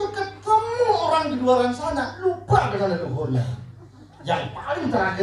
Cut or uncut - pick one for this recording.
uncut